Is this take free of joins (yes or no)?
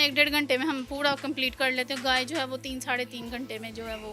yes